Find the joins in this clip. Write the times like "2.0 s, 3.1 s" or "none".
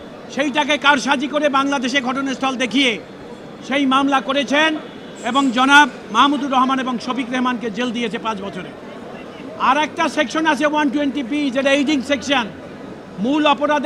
none